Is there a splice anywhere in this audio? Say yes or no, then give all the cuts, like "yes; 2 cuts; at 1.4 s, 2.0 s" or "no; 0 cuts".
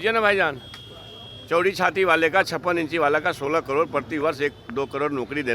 no; 0 cuts